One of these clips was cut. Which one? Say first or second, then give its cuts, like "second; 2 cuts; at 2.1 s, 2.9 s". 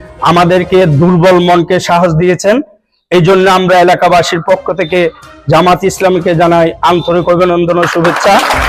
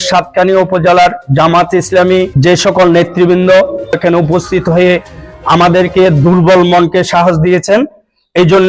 second; 2 cuts; at 2.3 s, 4.0 s